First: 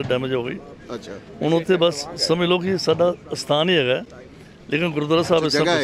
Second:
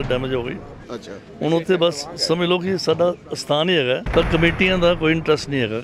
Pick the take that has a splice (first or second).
second